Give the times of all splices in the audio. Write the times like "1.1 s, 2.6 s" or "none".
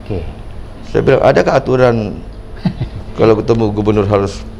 none

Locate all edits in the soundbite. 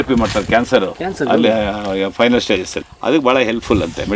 2.8 s

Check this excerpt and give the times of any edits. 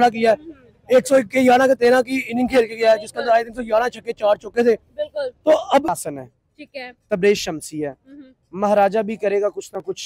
6.0 s

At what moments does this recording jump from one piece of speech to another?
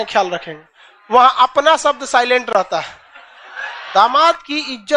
3.8 s

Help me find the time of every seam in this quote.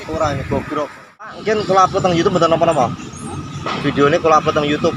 1.4 s

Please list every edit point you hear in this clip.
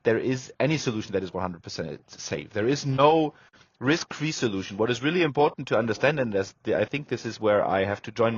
none

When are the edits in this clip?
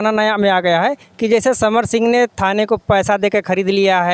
none

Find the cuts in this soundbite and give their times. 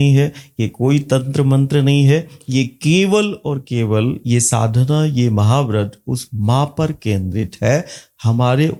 none

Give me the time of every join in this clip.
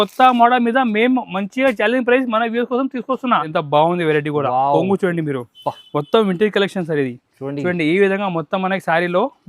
3.5 s

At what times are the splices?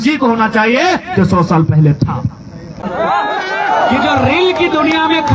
none

